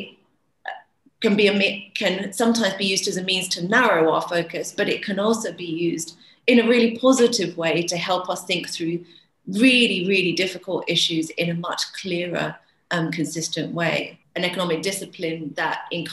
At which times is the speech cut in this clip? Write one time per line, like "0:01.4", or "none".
0:14.2

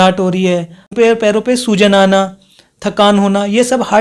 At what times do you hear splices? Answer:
0:00.9

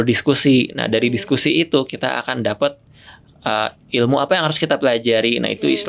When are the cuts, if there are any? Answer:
none

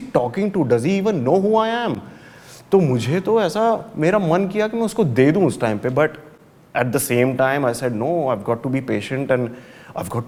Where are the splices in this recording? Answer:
none

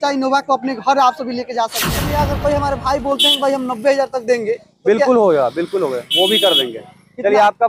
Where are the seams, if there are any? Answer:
0:02.1

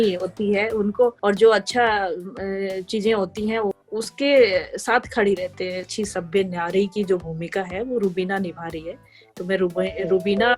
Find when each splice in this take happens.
0:01.2
0:03.8
0:05.9

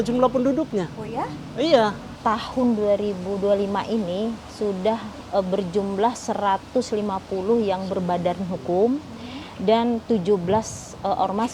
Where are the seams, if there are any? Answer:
0:02.1
0:05.2

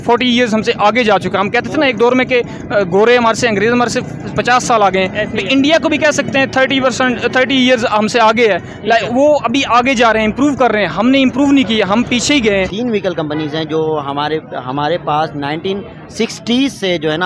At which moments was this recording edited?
0:12.7

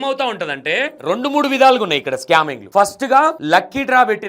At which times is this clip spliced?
0:01.0
0:02.6
0:03.4

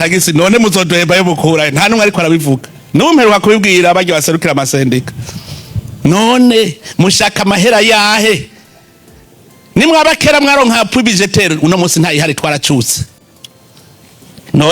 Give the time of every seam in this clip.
none

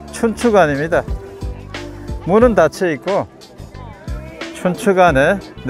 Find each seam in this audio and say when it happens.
none

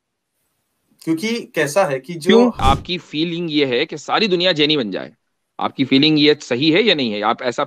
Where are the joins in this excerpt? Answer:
0:02.6

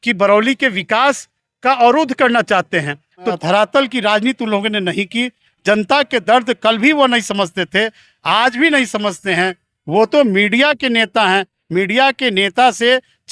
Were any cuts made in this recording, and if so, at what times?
0:03.3

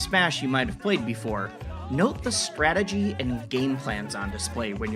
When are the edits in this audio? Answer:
none

